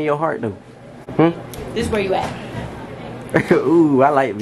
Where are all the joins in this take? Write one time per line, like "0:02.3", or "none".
0:01.0